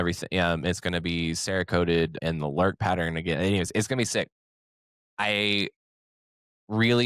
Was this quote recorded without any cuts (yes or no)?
no